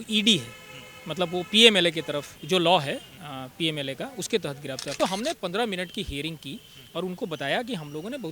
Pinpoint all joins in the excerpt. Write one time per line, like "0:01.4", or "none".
0:02.3
0:05.0

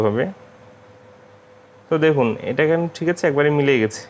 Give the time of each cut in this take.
none

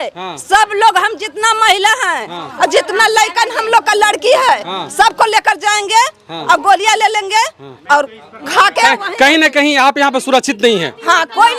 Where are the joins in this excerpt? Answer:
none

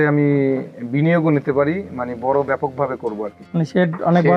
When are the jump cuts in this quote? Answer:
0:03.3

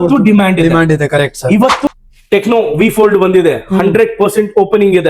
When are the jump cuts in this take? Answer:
0:01.9

